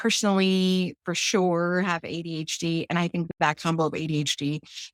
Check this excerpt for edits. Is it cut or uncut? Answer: uncut